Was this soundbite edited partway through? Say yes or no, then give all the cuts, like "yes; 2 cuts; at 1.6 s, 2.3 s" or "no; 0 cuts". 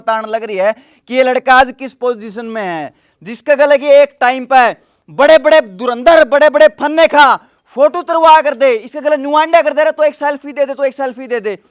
no; 0 cuts